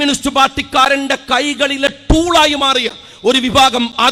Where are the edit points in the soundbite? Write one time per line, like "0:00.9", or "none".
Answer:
none